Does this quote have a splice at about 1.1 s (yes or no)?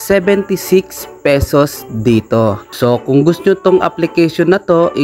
no